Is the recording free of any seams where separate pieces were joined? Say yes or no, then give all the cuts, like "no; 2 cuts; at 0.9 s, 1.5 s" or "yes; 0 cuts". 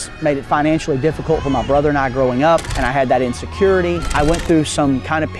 no; 2 cuts; at 2.8 s, 4.1 s